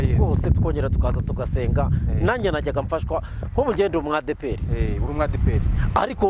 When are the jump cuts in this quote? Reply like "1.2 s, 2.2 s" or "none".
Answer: none